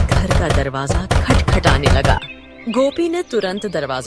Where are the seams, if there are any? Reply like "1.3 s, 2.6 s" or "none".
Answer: none